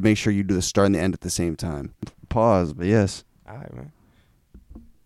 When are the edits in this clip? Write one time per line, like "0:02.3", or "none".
0:02.1